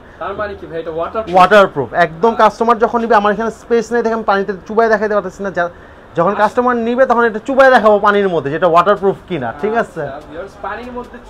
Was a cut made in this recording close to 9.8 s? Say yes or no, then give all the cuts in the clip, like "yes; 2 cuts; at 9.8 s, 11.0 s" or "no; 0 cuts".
no; 0 cuts